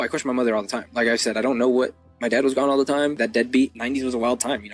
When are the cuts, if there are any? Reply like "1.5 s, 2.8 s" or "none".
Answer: 0.9 s, 3.5 s

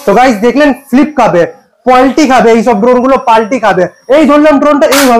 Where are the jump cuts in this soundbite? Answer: 4.0 s

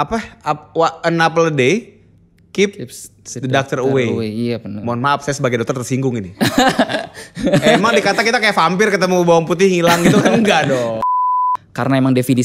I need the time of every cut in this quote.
11.1 s

